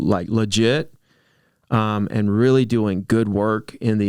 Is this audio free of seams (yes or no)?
yes